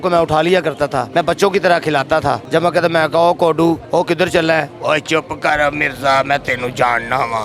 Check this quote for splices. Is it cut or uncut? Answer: cut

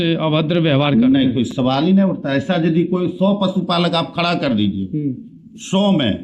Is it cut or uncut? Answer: uncut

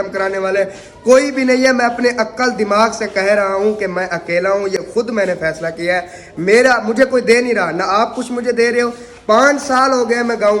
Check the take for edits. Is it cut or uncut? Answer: uncut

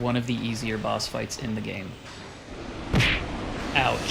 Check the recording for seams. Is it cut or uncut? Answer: uncut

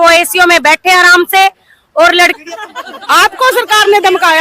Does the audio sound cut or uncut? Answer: cut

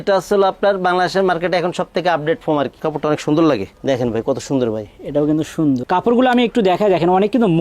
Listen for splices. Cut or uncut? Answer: cut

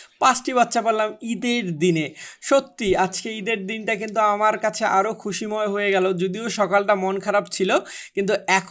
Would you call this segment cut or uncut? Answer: uncut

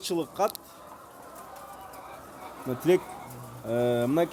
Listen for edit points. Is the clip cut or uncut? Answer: uncut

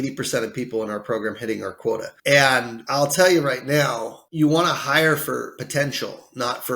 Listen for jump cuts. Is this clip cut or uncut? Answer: cut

